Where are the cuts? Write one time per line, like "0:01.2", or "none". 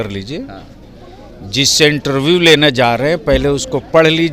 none